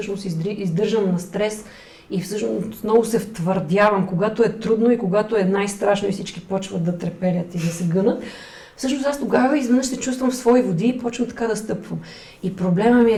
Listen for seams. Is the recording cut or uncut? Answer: uncut